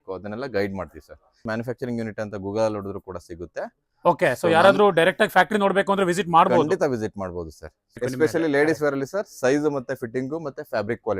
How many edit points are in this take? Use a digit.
2